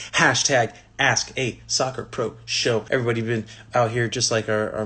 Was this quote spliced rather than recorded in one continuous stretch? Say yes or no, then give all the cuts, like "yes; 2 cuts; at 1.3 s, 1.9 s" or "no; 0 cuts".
yes; 1 cut; at 2.8 s